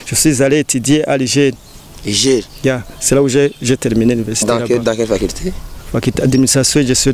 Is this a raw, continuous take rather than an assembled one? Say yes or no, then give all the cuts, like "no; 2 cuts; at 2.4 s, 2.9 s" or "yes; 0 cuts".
yes; 0 cuts